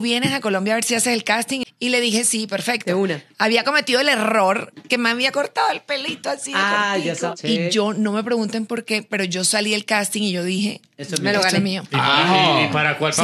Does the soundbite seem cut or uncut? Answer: cut